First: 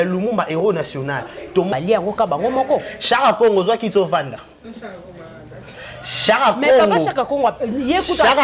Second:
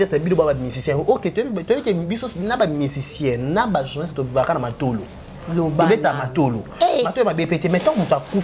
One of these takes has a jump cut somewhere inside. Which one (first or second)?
first